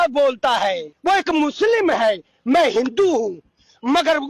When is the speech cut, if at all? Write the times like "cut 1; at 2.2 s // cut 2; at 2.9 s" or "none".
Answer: cut 1; at 1.0 s